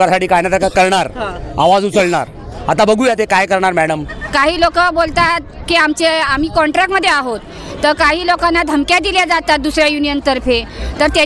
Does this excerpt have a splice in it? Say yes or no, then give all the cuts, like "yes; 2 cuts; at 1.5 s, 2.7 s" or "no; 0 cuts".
yes; 1 cut; at 4.1 s